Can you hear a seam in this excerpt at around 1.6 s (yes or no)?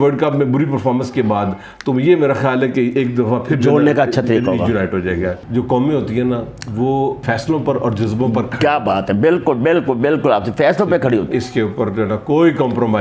no